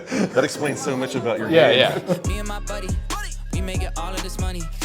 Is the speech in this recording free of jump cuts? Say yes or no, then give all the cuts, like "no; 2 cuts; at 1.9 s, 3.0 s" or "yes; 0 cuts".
no; 1 cut; at 2.1 s